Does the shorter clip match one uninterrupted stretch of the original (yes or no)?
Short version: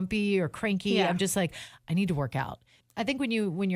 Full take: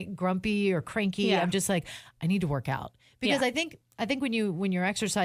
no